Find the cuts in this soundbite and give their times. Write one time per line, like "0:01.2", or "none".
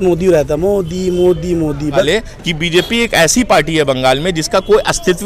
0:02.0

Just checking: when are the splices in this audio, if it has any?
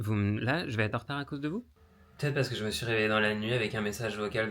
0:01.7

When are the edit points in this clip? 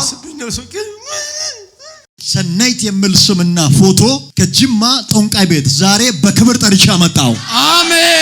0:02.0

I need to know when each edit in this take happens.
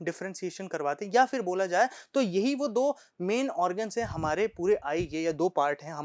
none

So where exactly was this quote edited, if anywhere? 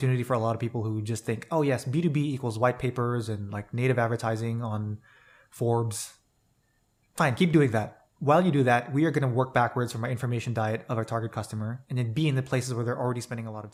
none

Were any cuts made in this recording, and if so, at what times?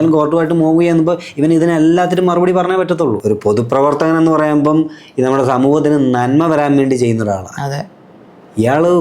0:03.2

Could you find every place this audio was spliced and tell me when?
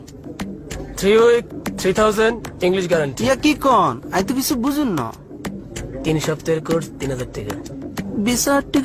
0:05.3

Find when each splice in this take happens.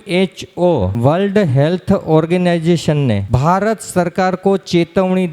0:00.9
0:03.3

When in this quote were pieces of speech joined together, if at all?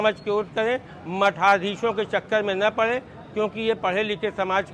none

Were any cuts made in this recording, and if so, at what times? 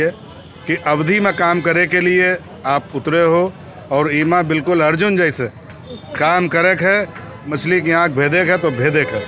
0:07.5

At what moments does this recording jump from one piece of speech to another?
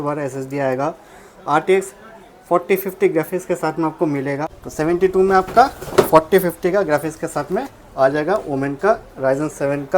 0:04.4

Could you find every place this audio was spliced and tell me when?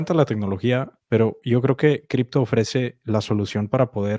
0:00.9

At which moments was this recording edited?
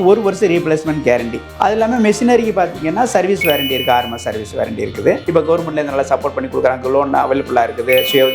0:01.4
0:05.2

